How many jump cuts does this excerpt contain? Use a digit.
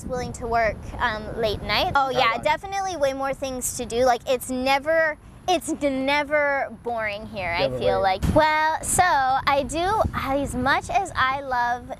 2